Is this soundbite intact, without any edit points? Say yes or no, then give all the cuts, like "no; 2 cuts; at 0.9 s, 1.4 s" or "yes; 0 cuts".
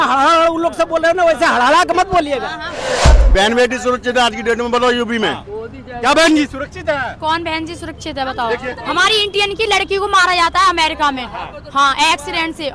no; 1 cut; at 3.0 s